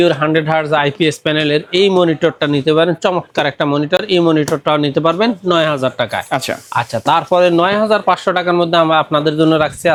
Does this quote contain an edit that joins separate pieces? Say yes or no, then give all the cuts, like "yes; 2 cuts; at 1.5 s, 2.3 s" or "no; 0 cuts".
no; 0 cuts